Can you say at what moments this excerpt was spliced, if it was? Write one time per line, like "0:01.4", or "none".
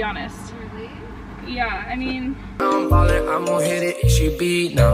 0:02.6